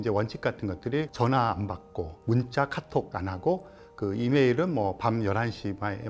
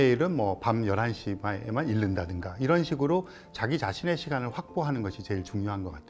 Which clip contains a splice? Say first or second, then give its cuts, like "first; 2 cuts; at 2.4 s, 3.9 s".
first; 3 cuts; at 1.1 s, 2.2 s, 3.1 s